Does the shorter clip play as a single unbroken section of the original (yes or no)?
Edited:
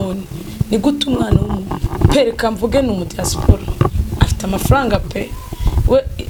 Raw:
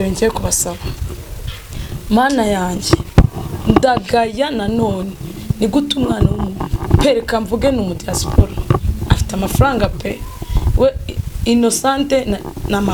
yes